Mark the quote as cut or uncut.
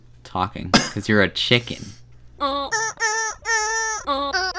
cut